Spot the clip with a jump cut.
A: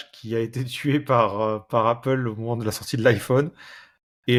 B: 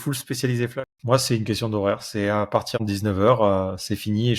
B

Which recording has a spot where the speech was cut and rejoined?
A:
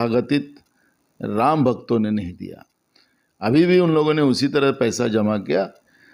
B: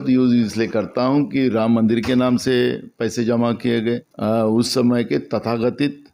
B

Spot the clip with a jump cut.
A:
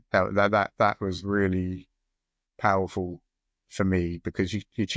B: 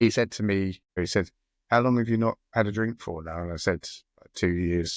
B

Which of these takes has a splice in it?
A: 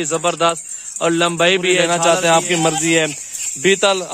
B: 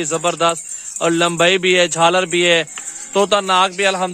A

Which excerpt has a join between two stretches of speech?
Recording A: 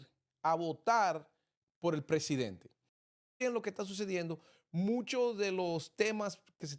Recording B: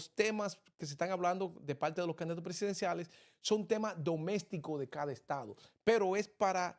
A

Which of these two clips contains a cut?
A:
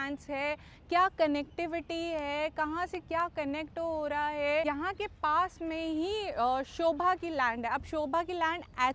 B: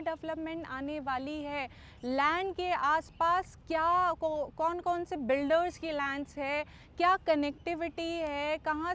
A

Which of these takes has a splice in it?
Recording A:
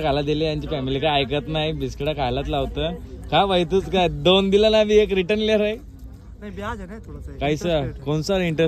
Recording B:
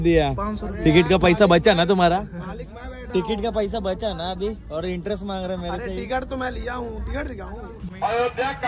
B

